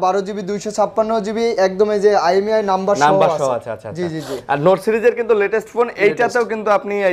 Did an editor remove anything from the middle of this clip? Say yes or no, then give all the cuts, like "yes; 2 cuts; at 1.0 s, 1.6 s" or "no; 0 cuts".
no; 0 cuts